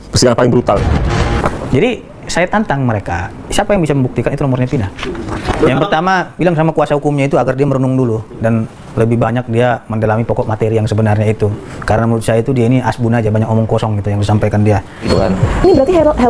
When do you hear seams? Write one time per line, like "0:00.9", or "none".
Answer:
0:01.4
0:05.5
0:15.1